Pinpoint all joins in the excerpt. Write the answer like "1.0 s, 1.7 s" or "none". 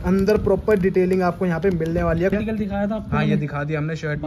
2.3 s